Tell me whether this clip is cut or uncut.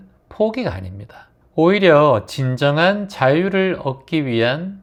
uncut